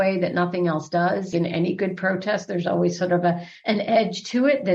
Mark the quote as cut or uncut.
cut